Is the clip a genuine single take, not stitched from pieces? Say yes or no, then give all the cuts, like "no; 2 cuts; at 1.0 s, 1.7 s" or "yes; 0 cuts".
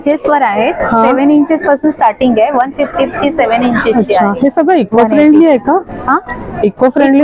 yes; 0 cuts